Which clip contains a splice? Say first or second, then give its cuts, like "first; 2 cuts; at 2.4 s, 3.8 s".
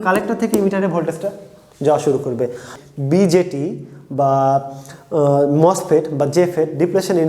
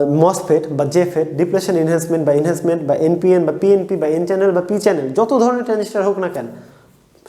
first; 1 cut; at 2.7 s